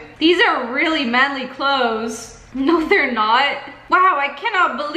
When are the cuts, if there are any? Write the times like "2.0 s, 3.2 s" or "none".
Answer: none